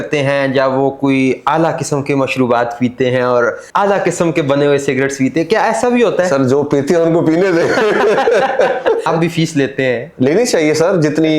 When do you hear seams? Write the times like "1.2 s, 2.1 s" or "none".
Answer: 3.6 s, 9.1 s